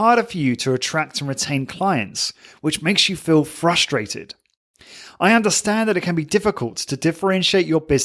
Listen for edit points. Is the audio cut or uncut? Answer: uncut